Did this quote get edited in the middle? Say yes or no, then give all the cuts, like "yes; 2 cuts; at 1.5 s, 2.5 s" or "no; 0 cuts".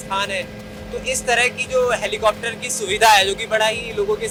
no; 0 cuts